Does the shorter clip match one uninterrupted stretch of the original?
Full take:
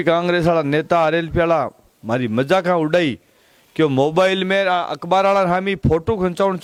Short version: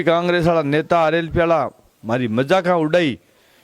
yes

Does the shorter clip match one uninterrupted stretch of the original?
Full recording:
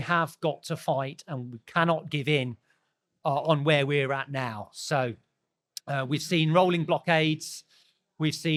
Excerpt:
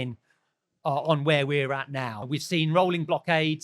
no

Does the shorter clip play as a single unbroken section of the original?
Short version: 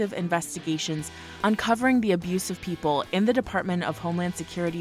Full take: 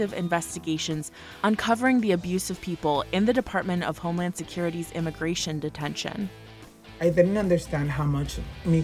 yes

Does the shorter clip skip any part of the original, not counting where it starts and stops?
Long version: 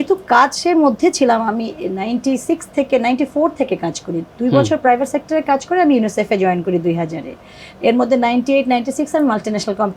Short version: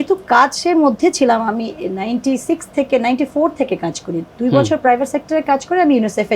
no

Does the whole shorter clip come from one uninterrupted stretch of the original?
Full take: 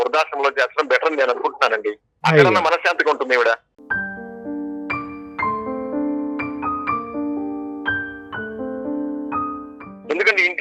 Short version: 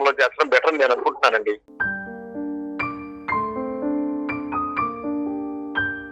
no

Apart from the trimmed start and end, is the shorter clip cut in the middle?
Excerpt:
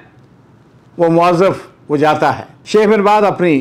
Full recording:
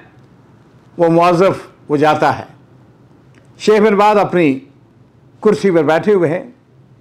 yes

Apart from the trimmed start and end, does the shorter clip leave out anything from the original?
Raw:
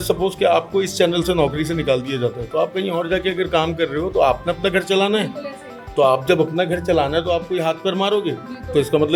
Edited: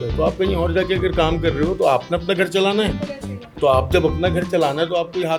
no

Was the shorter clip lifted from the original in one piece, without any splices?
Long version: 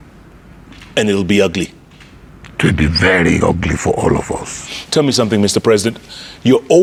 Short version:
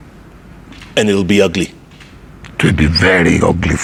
yes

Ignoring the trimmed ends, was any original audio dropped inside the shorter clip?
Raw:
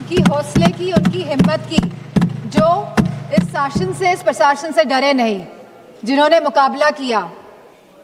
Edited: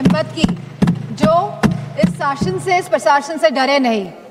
no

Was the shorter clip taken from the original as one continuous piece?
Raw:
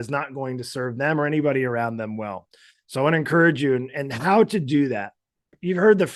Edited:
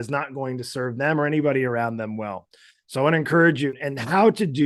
no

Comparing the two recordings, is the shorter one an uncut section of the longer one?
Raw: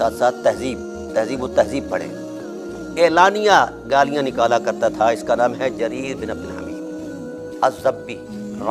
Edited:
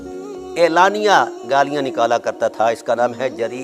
yes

